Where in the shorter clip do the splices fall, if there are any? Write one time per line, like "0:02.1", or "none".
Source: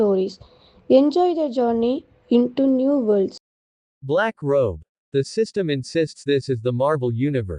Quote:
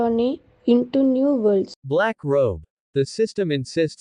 0:01.8